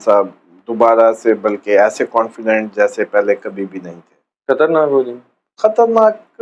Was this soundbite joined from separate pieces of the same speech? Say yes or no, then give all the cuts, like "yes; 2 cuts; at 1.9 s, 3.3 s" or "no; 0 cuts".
no; 0 cuts